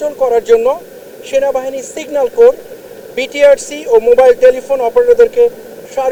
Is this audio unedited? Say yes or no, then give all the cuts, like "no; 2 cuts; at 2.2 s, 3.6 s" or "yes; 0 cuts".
yes; 0 cuts